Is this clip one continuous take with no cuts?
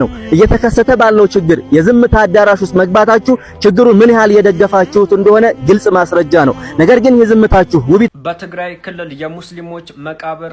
no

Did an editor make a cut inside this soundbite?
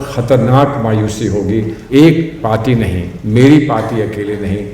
yes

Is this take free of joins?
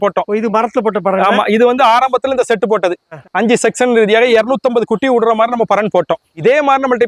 yes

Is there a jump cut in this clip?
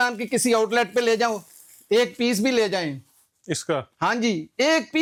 no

